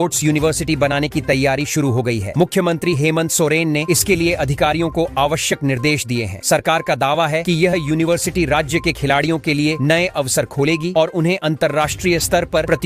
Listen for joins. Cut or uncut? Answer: uncut